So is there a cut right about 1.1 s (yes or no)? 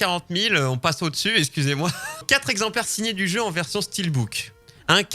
no